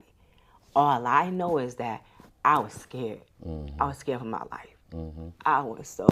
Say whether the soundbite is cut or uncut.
uncut